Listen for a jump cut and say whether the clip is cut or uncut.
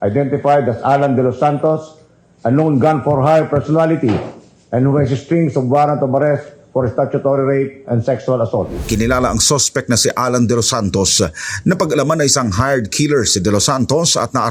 cut